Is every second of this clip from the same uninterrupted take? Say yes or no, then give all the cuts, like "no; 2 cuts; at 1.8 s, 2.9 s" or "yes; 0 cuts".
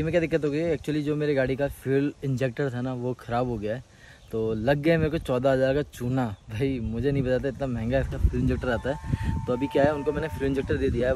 yes; 0 cuts